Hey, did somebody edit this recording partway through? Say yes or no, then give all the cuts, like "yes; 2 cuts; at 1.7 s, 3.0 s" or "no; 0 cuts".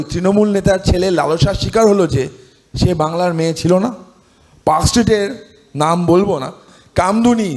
yes; 1 cut; at 6.7 s